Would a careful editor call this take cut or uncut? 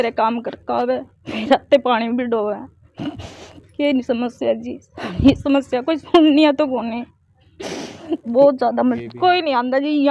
cut